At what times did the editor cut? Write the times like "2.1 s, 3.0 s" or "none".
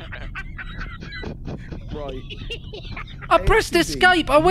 none